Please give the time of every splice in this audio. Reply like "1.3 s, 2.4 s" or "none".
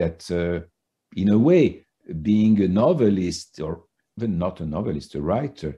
none